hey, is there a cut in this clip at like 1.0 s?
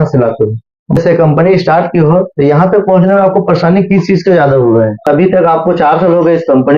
yes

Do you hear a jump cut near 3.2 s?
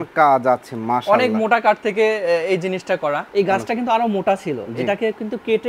yes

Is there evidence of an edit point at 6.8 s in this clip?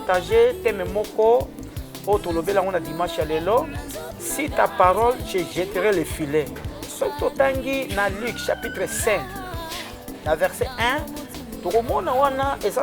yes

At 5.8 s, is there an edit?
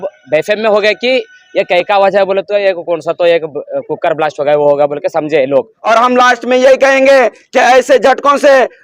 yes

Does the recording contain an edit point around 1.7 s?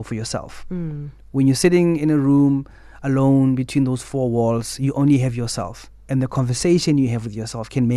no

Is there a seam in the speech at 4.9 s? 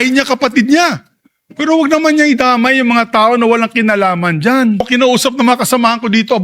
yes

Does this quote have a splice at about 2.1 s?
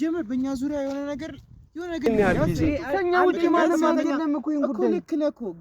yes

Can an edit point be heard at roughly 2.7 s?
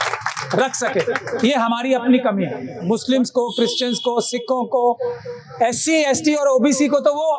yes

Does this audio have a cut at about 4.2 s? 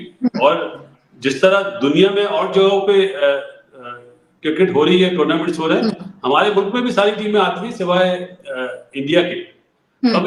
no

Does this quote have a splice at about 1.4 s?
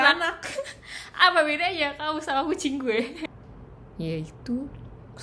no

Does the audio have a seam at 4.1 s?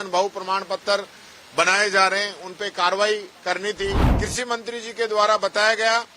yes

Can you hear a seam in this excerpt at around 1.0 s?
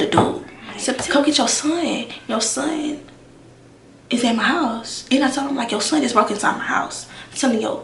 yes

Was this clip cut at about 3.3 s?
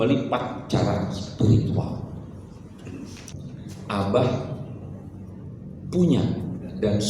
yes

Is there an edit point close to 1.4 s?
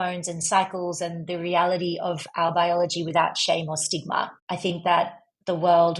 no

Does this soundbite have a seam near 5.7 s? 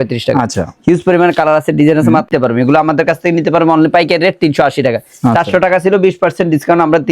no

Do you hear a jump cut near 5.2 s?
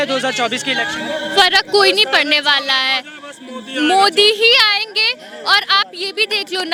no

